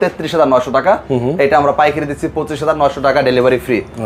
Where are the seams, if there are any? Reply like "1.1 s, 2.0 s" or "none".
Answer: none